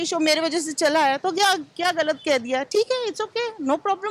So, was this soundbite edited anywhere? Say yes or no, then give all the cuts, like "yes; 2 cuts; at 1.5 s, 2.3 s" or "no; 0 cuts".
no; 0 cuts